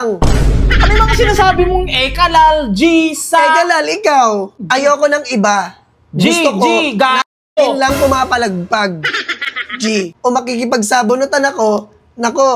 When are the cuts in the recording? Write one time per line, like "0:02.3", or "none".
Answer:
0:04.5
0:10.1